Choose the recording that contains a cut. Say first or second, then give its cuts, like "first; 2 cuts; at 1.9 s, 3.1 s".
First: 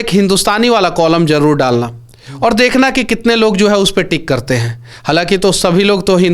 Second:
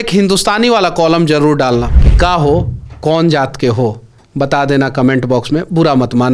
second; 1 cut; at 2.0 s